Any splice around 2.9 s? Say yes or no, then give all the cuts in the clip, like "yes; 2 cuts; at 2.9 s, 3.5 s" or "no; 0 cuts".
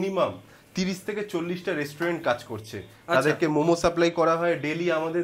no; 0 cuts